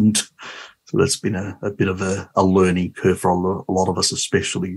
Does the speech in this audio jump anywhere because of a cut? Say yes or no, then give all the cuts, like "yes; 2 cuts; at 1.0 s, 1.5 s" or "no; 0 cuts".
no; 0 cuts